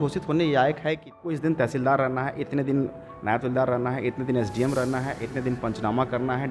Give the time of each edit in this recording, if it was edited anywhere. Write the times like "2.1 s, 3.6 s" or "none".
1.4 s